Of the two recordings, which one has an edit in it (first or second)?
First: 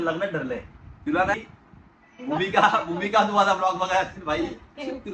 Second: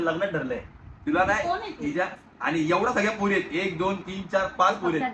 first